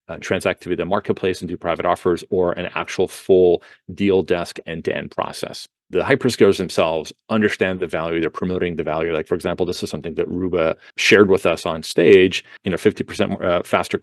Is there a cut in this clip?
yes; 3 cuts; at 5.9 s, 10.9 s, 12.6 s

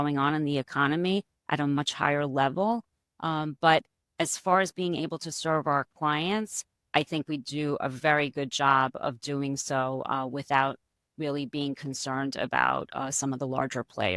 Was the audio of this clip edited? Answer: no; 0 cuts

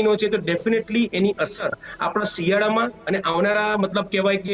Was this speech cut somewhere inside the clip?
no; 0 cuts

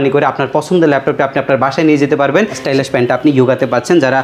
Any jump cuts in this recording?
yes; 1 cut; at 2.6 s

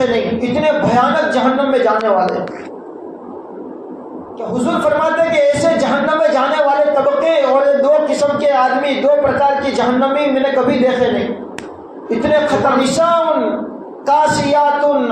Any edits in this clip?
yes; 2 cuts; at 4.5 s, 12.7 s

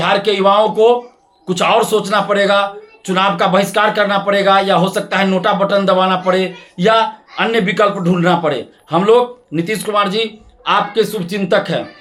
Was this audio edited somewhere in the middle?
no; 0 cuts

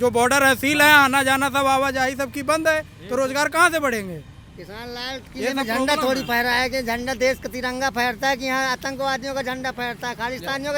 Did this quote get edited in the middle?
no; 0 cuts

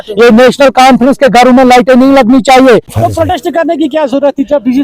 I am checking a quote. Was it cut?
yes; 1 cut; at 3.0 s

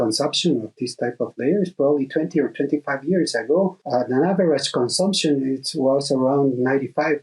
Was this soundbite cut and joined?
yes; 1 cut; at 3.8 s

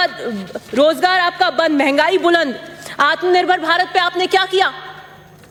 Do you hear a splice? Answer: no; 0 cuts

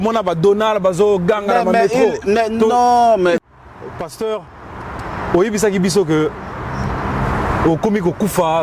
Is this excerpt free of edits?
no; 1 cut; at 3.4 s

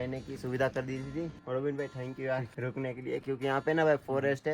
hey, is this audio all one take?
no; 2 cuts; at 1.4 s, 2.5 s

